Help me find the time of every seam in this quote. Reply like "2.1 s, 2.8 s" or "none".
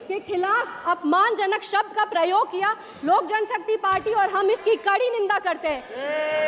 none